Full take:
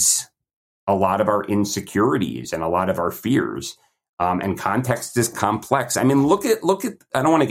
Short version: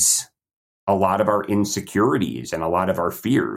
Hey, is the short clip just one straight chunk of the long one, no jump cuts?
yes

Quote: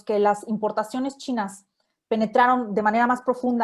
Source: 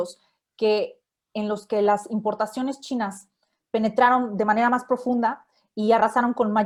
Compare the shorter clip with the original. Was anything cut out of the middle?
no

